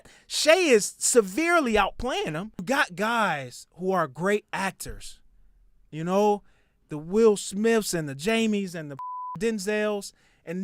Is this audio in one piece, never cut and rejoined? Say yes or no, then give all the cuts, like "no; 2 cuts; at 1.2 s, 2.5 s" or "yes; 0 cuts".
no; 1 cut; at 2.6 s